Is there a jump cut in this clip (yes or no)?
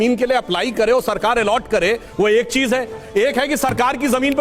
no